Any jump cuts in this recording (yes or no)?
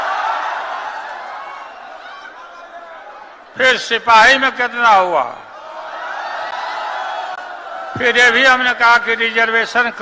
no